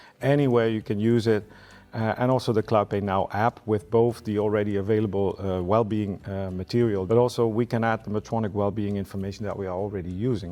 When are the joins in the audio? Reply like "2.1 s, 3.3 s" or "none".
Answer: none